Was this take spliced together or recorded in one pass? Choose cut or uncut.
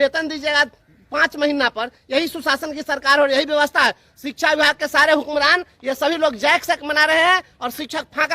uncut